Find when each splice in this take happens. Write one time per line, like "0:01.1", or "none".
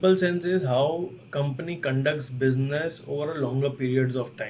none